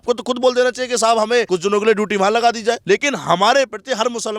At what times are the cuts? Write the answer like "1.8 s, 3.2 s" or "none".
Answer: 1.5 s, 2.8 s